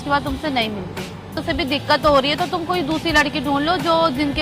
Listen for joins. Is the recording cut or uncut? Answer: cut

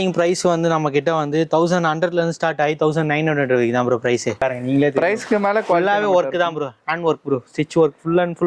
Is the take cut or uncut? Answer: cut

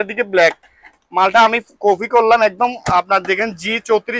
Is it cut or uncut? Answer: uncut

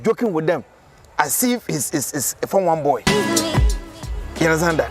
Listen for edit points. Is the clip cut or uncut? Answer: uncut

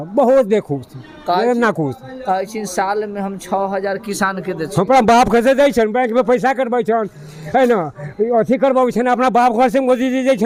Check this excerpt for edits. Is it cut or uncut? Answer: uncut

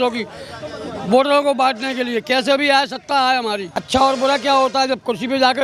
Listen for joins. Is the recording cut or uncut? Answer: cut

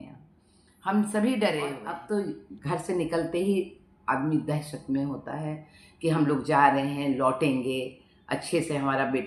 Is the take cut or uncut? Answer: cut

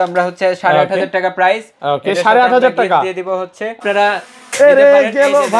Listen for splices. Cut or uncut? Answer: cut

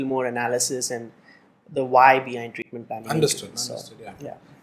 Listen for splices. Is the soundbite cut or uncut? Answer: uncut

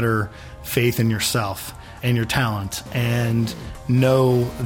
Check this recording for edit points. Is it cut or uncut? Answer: cut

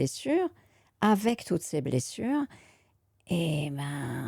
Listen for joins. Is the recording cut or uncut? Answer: uncut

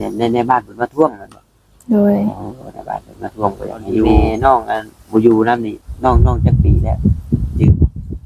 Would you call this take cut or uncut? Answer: cut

